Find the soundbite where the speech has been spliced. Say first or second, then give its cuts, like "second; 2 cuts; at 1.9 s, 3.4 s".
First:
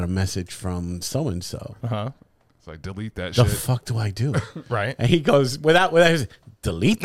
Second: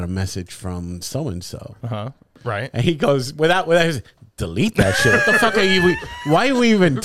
second; 1 cut; at 2.3 s